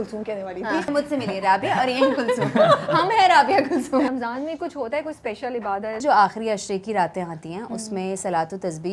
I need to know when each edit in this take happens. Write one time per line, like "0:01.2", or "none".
0:00.9
0:04.1
0:06.0